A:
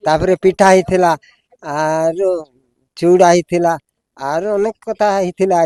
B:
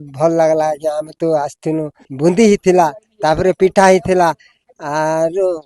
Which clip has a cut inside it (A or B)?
B